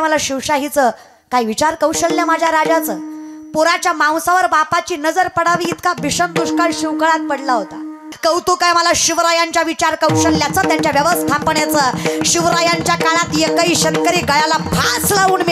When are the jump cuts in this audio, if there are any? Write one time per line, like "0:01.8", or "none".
0:08.1